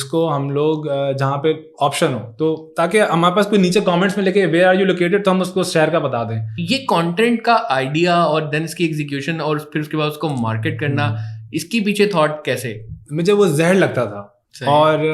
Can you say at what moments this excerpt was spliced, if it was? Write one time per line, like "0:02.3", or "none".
0:06.5
0:13.0